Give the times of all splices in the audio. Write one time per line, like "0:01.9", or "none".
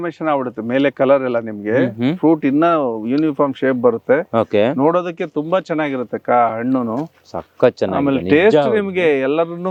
none